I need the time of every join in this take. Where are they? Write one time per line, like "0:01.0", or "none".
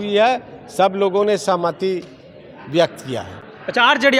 none